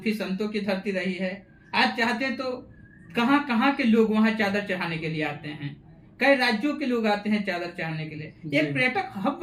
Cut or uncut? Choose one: uncut